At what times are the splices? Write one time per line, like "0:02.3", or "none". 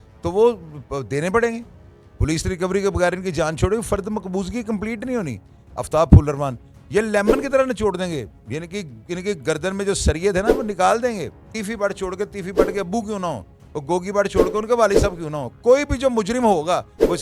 0:05.6
0:11.5